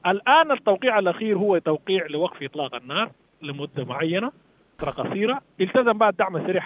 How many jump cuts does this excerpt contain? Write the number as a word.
one